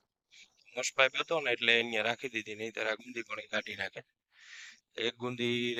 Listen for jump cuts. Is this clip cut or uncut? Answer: uncut